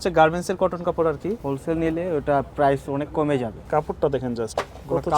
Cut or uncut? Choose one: cut